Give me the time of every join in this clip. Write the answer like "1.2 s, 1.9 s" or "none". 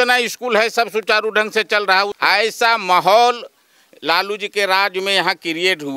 2.1 s